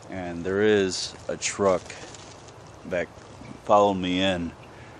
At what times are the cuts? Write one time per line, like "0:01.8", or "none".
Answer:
none